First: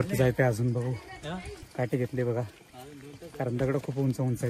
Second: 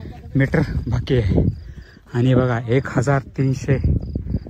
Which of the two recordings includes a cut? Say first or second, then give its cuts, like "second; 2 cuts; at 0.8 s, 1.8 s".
first; 1 cut; at 1.6 s